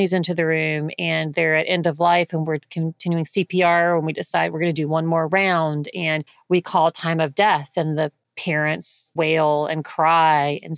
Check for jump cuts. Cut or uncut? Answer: uncut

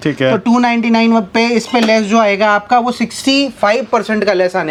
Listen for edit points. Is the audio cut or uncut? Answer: uncut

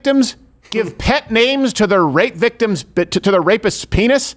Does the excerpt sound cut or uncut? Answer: uncut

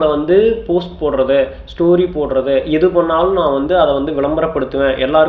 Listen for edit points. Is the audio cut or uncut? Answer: uncut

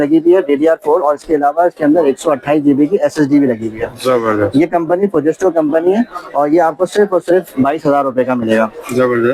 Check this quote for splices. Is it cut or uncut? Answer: uncut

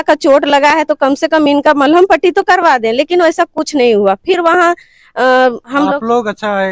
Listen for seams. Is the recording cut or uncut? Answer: uncut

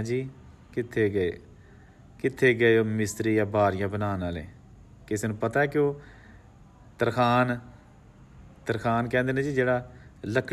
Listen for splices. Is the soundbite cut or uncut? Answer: uncut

